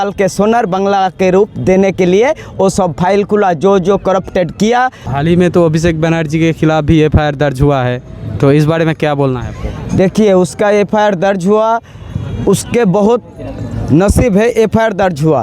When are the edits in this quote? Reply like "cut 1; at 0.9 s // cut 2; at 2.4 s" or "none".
cut 1; at 5.1 s